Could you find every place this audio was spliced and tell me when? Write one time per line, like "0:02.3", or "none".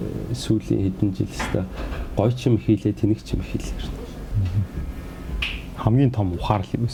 none